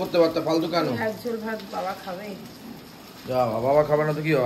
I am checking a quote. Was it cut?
no; 0 cuts

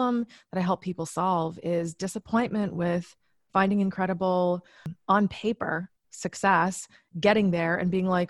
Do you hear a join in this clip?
yes; 1 cut; at 4.9 s

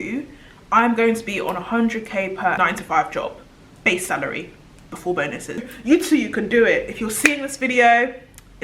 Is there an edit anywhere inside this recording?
yes; 2 cuts; at 2.6 s, 5.7 s

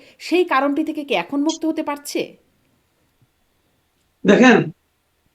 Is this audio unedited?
yes; 0 cuts

